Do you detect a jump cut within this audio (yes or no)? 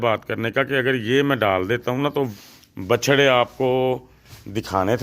yes